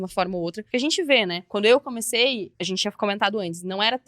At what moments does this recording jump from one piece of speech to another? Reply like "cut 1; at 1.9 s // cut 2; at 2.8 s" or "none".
cut 1; at 0.9 s // cut 2; at 2.5 s